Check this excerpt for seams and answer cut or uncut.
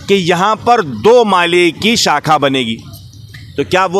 uncut